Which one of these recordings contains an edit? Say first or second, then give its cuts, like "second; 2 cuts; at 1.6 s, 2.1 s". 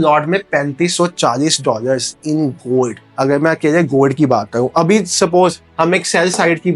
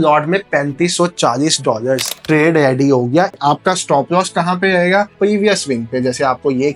second; 3 cuts; at 2.2 s, 3.4 s, 5.1 s